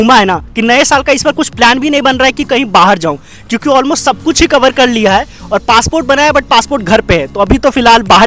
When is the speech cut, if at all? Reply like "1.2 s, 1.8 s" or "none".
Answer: none